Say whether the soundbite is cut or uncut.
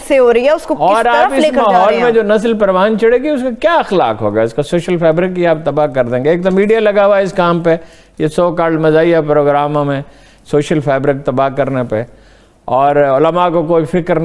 uncut